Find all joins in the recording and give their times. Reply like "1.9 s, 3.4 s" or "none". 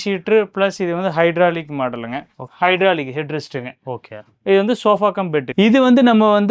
2.4 s, 5.5 s